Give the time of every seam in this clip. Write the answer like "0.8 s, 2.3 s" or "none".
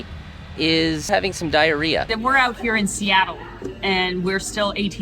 2.1 s